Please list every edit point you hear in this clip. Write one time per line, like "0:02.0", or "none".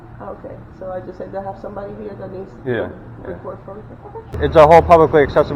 0:04.3